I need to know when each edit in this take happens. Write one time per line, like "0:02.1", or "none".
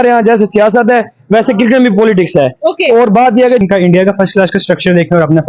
0:03.6